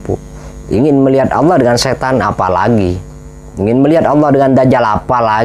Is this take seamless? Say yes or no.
yes